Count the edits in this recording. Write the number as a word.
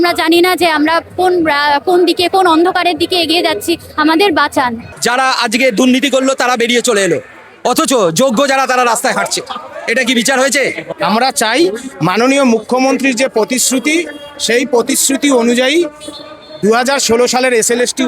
two